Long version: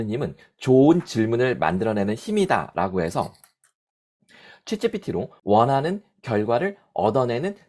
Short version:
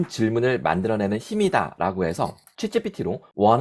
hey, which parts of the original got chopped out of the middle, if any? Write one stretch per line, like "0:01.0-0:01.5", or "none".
0:03.4-0:04.5

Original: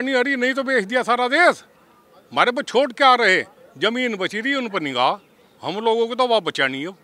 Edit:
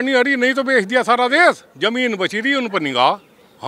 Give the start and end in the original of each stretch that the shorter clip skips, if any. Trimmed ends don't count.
0:01.7-0:03.7

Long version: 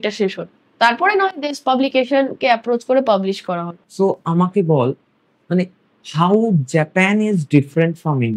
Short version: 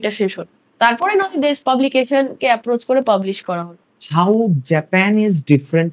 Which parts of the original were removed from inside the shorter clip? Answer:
0:03.8-0:05.8

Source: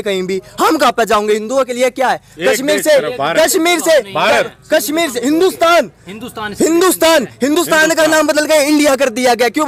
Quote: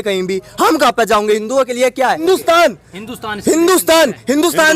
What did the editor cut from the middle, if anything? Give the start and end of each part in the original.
0:02.2-0:05.3

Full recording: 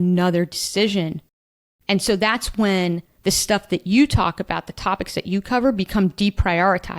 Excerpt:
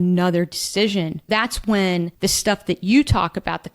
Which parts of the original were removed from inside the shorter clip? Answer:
0:01.3-0:02.2
0:03.0-0:03.2

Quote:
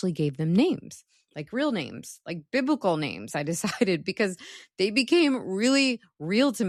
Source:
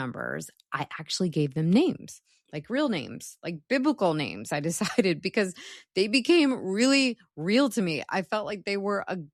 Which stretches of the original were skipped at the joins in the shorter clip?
none

